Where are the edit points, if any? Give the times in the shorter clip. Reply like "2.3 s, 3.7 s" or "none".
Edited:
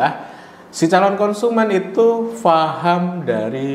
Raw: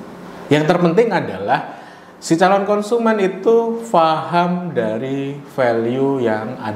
none